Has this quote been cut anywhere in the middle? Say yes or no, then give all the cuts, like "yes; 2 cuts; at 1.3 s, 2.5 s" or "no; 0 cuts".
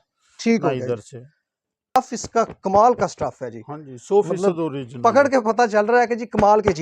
yes; 1 cut; at 2.0 s